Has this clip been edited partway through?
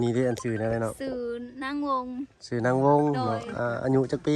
no; 0 cuts

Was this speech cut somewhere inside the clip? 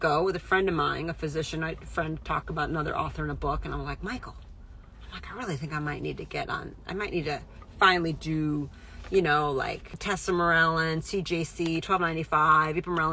yes; 1 cut; at 9.9 s

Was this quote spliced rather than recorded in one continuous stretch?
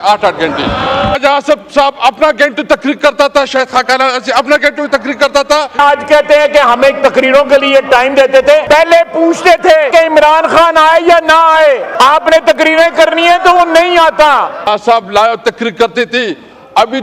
yes; 6 cuts; at 1.2 s, 5.8 s, 8.6 s, 9.9 s, 11.9 s, 14.7 s

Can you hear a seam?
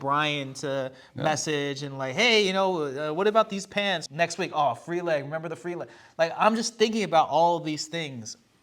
yes; 1 cut; at 4.0 s

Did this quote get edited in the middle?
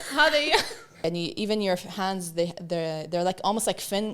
yes; 1 cut; at 1.0 s

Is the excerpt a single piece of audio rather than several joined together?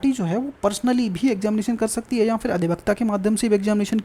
yes; 0 cuts

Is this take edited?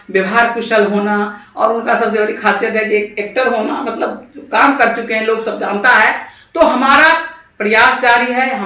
no; 0 cuts

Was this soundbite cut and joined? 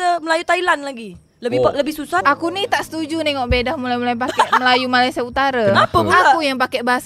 yes; 1 cut; at 2.2 s

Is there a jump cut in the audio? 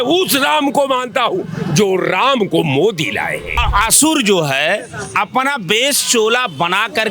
yes; 1 cut; at 3.6 s

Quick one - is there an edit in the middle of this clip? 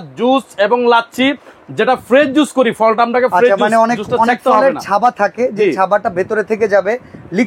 no; 0 cuts

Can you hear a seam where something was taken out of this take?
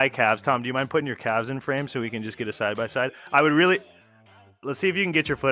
no; 0 cuts

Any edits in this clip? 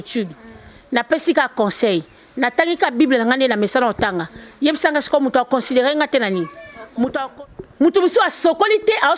yes; 1 cut; at 7.3 s

